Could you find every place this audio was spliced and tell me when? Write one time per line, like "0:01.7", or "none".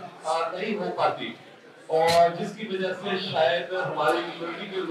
none